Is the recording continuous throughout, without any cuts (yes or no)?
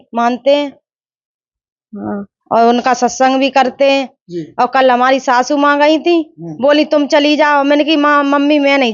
yes